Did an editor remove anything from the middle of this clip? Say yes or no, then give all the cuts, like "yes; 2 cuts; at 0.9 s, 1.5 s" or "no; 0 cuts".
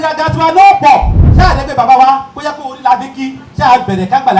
yes; 2 cuts; at 1.2 s, 3.4 s